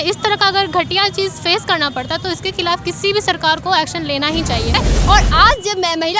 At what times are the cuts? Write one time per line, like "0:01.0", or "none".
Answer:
0:04.9